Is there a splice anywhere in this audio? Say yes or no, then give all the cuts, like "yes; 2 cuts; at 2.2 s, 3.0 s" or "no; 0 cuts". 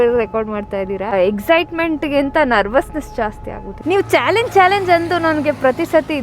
yes; 2 cuts; at 1.1 s, 3.7 s